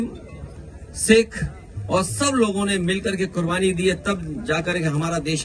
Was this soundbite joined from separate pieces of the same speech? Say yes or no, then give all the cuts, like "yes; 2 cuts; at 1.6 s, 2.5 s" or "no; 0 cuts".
no; 0 cuts